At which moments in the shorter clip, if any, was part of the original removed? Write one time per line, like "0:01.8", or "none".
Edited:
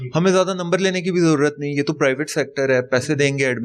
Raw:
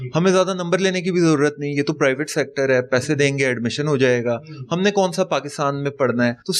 none